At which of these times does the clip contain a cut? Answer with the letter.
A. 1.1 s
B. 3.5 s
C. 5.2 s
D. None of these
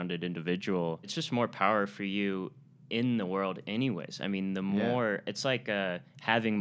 A